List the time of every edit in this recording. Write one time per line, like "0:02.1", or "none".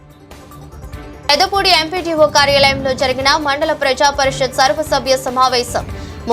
0:01.1